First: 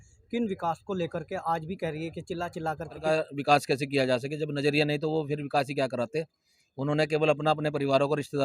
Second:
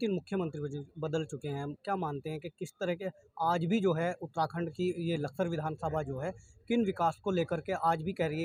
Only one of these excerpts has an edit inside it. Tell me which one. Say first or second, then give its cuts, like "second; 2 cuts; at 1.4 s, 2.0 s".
first; 1 cut; at 3.0 s